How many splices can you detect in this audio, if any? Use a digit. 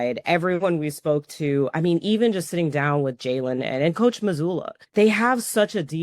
1